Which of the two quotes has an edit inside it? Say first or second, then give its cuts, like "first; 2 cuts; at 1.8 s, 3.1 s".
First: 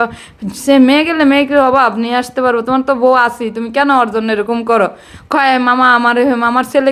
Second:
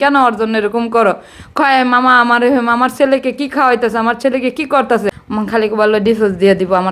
second; 1 cut; at 5.2 s